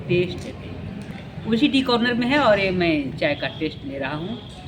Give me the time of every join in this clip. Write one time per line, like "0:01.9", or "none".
0:01.1